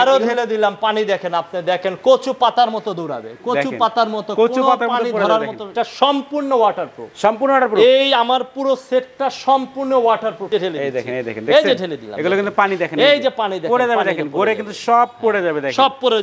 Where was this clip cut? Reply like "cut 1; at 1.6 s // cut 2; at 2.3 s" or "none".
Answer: cut 1; at 5.7 s // cut 2; at 10.5 s